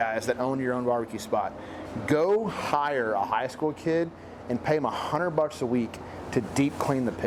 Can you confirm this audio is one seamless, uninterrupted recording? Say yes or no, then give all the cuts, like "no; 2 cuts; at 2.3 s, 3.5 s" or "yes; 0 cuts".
yes; 0 cuts